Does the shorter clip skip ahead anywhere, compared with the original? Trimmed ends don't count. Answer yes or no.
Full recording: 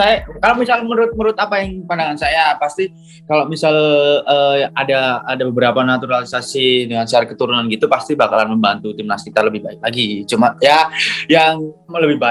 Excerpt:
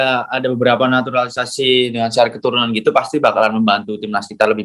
no